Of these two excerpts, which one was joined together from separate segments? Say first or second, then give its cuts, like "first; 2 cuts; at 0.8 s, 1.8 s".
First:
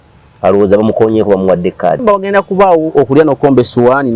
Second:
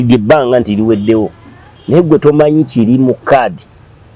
first; 1 cut; at 2.0 s